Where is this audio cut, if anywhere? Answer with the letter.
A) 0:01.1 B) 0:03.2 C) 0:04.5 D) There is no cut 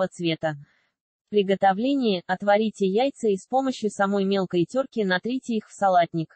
A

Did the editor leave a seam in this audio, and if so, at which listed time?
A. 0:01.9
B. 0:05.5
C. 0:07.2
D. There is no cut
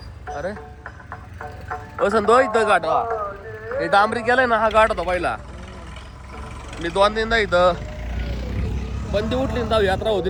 D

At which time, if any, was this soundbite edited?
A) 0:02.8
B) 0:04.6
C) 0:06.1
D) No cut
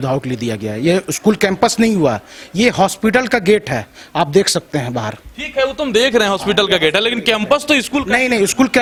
D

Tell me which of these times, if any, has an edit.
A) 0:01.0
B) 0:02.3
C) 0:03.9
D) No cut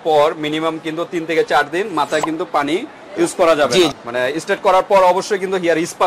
C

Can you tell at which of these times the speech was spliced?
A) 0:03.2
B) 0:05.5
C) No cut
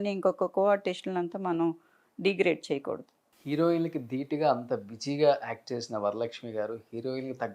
A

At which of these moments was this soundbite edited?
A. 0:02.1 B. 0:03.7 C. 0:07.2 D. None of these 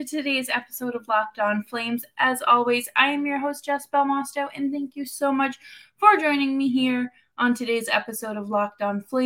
D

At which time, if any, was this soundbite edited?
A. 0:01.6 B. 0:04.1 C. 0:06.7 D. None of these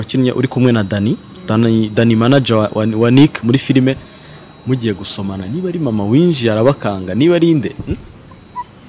D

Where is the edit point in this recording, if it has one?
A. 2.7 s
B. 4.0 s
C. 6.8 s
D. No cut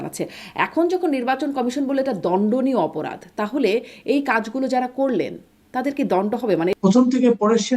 C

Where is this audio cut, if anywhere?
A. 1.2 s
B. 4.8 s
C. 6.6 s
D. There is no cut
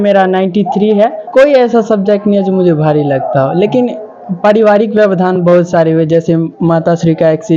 A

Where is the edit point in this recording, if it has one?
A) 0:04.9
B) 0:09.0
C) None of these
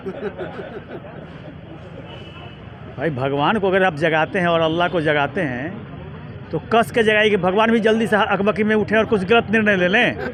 C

